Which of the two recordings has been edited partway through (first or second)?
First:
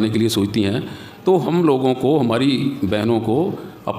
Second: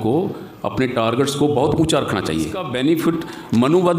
second